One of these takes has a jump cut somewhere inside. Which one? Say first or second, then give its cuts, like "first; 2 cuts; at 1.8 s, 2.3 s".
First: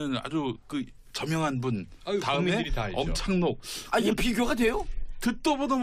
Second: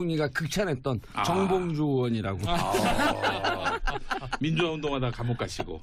first; 1 cut; at 2.9 s